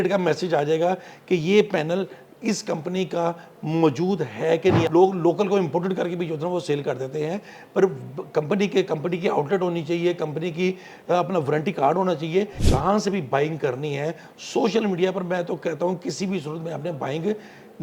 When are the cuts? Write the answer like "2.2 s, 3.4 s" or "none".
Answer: 4.9 s, 12.6 s